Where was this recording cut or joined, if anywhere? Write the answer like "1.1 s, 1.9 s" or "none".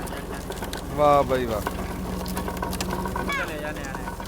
3.3 s